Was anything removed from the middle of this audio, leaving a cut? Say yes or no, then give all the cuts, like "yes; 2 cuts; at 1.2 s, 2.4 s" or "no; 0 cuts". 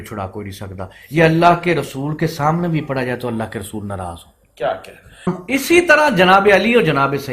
yes; 1 cut; at 5.3 s